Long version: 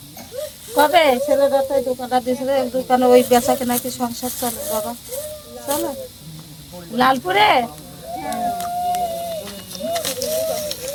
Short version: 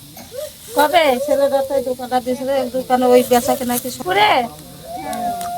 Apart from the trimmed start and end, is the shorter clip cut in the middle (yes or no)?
yes